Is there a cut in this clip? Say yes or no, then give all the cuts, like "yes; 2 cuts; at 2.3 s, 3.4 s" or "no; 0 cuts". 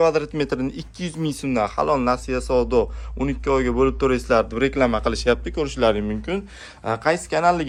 no; 0 cuts